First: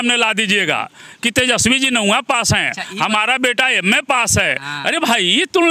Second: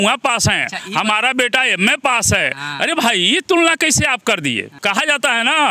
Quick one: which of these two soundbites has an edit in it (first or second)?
second